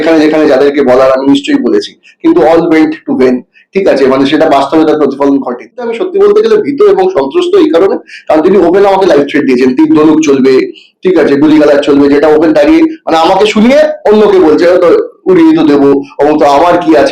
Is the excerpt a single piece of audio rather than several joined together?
no; 1 cut; at 6.0 s

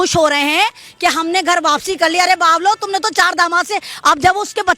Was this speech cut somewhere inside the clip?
no; 0 cuts

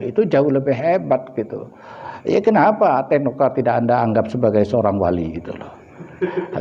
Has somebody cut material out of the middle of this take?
no; 0 cuts

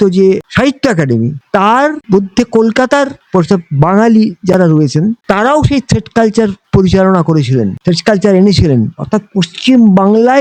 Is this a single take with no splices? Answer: yes; 0 cuts

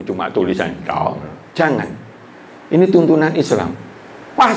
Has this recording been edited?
no; 0 cuts

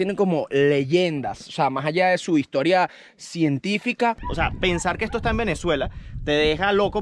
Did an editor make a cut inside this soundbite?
yes; 1 cut; at 4.2 s

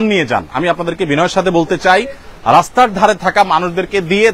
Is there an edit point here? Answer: no; 0 cuts

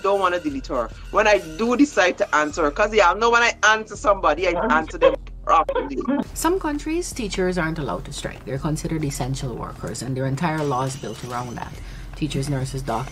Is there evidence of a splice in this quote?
yes; 1 cut; at 6.3 s

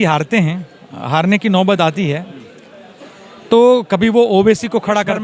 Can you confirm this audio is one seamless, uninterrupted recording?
yes; 0 cuts

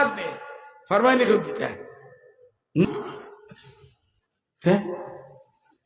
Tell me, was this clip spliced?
yes; 1 cut; at 2.8 s

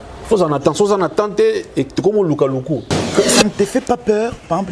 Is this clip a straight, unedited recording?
no; 1 cut; at 3.1 s

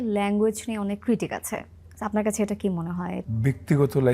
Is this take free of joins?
no; 1 cut; at 3.2 s

